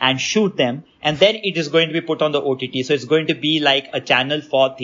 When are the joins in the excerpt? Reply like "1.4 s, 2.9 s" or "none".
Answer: none